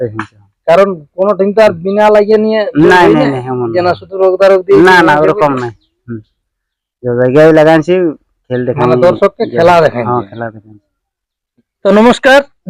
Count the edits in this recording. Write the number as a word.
zero